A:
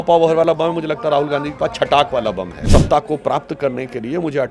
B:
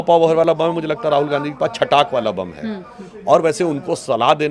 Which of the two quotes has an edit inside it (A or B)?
A